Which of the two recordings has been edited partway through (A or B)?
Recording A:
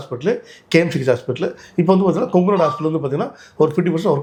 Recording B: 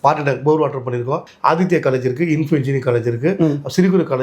B